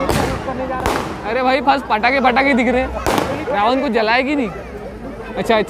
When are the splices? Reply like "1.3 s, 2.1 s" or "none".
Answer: none